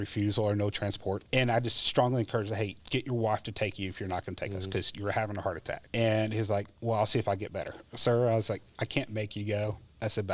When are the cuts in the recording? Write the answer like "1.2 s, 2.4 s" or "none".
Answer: 1.2 s, 2.8 s, 5.8 s, 7.8 s